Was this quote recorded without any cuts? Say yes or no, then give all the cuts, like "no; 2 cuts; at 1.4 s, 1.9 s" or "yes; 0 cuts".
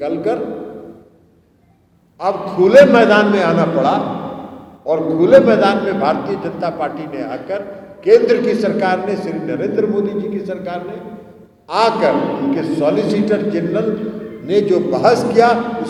yes; 0 cuts